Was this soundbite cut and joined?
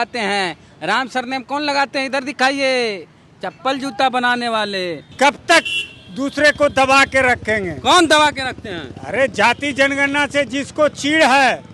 yes; 1 cut; at 5.0 s

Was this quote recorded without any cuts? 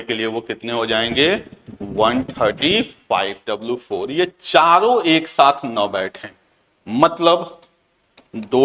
no; 1 cut; at 3.4 s

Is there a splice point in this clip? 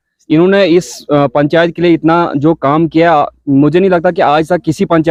no; 0 cuts

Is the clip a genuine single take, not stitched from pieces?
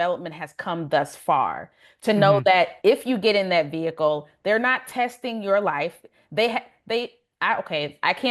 yes; 0 cuts

